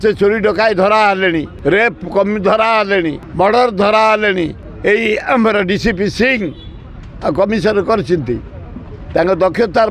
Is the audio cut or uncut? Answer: cut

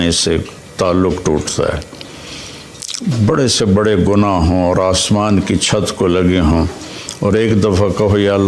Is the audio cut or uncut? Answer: uncut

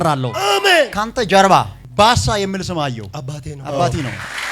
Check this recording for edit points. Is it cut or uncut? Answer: cut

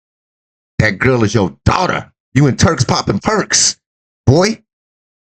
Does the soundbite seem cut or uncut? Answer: cut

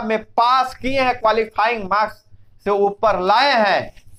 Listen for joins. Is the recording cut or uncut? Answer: uncut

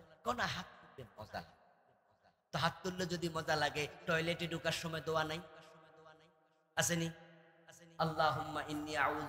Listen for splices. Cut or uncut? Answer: uncut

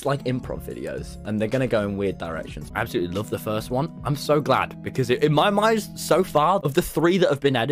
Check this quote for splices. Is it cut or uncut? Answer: cut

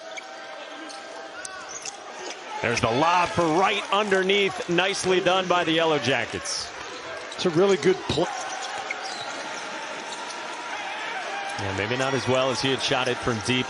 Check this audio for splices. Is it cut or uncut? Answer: cut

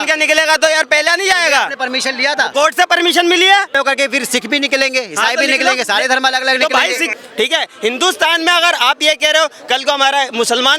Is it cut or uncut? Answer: cut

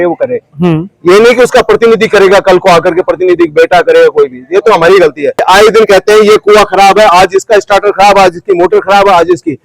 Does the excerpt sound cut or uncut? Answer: cut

